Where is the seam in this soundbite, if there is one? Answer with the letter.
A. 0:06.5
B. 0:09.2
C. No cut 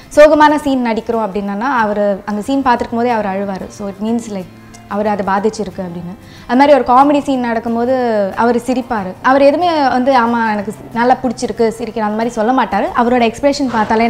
B